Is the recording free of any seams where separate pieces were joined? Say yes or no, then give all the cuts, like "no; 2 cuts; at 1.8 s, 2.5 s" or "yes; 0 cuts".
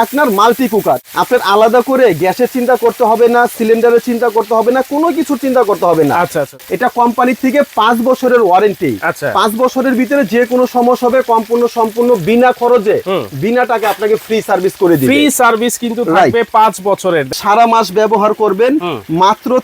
no; 3 cuts; at 1.0 s, 6.6 s, 17.3 s